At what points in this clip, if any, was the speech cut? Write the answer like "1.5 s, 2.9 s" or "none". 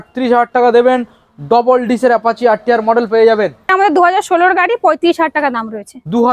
3.7 s